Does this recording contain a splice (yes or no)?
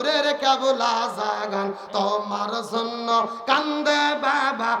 no